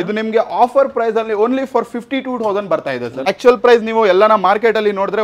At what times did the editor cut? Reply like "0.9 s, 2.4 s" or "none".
3.3 s